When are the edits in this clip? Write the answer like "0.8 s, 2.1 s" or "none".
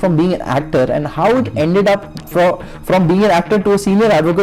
none

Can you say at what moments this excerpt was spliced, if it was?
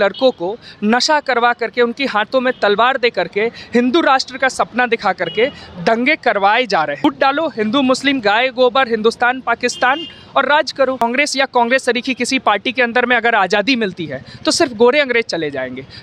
7.0 s, 11.0 s

